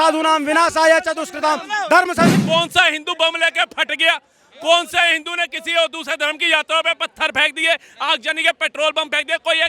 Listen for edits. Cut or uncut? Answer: cut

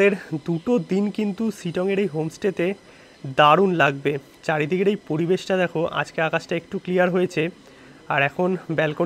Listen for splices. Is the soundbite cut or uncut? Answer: uncut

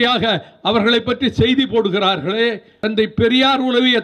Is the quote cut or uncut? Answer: cut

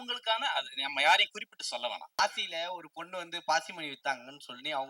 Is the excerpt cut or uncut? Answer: cut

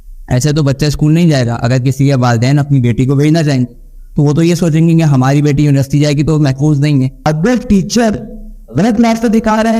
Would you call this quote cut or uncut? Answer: cut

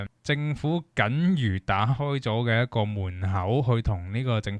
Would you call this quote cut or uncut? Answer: uncut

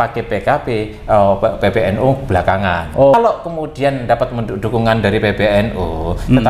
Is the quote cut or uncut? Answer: cut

